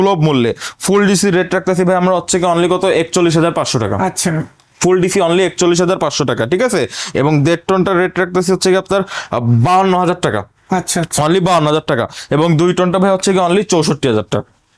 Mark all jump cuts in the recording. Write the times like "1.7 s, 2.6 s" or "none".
none